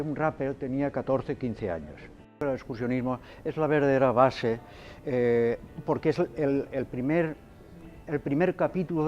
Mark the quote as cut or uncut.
cut